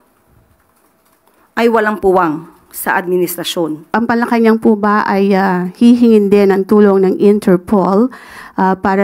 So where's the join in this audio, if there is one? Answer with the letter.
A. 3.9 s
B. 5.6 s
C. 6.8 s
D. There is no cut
A